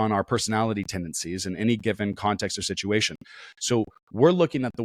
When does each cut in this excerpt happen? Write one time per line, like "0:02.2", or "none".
none

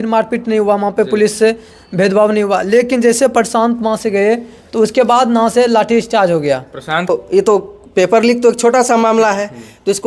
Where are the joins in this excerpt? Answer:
0:07.0

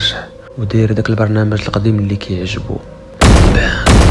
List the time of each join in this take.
0:03.0

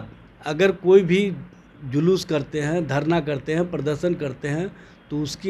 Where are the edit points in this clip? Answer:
none

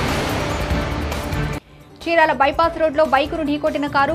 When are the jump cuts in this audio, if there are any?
0:01.4

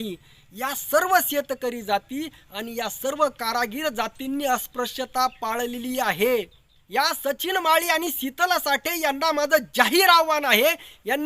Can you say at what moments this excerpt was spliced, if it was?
0:06.7

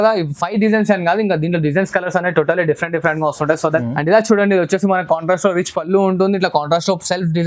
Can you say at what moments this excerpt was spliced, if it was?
0:03.9

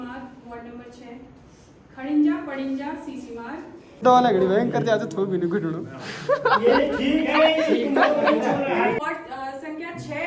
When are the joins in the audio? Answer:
0:04.0
0:09.0

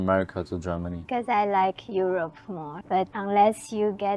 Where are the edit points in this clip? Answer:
0:01.0
0:02.9

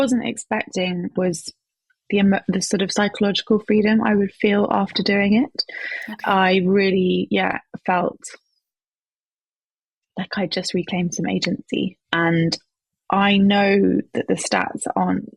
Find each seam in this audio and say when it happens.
0:01.1
0:12.0

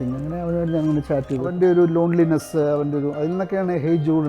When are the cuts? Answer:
0:01.5

